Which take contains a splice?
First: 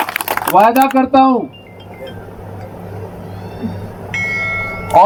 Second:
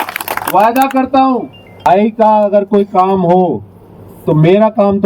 second; 1 cut; at 1.8 s

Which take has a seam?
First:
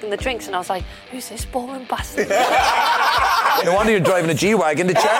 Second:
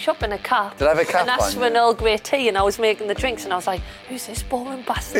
first; 1 cut; at 3.6 s

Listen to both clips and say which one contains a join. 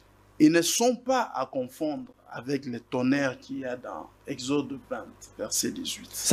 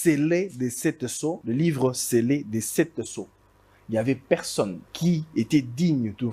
second; 2 cuts; at 1.4 s, 4.8 s

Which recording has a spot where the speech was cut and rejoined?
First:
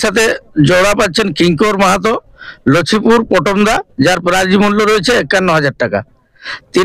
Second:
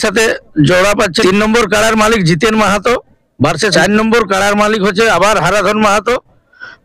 second; 2 cuts; at 1.2 s, 3.7 s

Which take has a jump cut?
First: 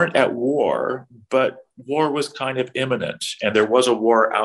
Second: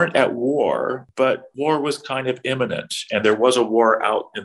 second; 1 cut; at 1.3 s

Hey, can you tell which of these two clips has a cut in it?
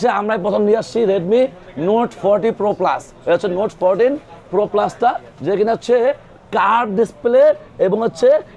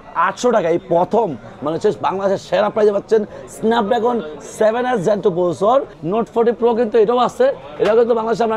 second; 1 cut; at 5.9 s

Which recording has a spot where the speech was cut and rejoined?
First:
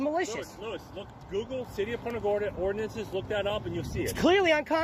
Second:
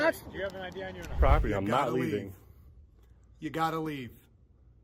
second; 1 cut; at 1.2 s

